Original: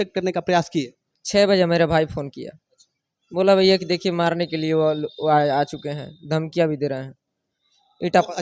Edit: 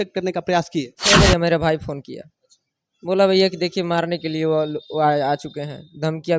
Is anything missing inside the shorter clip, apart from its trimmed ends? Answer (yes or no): yes